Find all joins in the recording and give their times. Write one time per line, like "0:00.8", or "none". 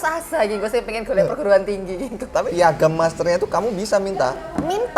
0:02.5

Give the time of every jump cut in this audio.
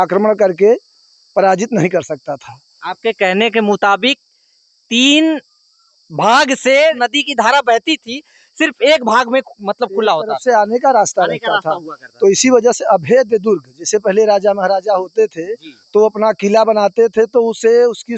0:07.0

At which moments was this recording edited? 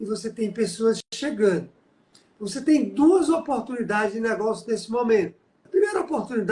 0:05.6

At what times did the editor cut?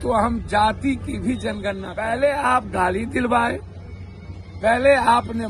0:01.9

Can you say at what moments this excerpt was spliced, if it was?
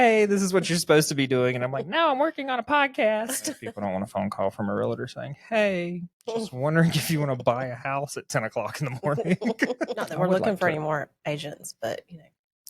0:03.6
0:10.0

